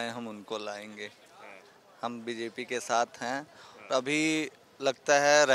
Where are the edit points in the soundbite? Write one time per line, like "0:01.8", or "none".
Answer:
none